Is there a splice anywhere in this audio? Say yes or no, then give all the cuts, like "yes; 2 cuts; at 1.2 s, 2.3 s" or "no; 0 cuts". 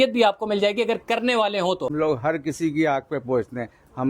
yes; 1 cut; at 2.0 s